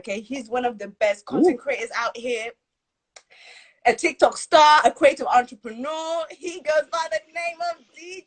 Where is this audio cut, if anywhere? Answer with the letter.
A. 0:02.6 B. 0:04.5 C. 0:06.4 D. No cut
D